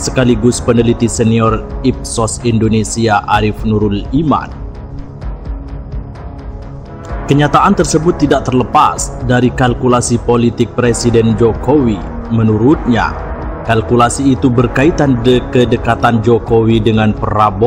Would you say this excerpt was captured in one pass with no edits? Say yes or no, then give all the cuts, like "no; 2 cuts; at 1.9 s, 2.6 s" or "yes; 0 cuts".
yes; 0 cuts